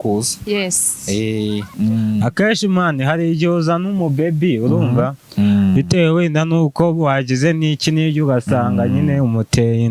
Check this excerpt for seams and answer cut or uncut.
cut